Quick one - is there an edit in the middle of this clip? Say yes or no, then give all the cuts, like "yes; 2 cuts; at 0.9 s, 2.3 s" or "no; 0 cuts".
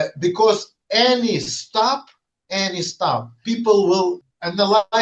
yes; 2 cuts; at 3.3 s, 4.2 s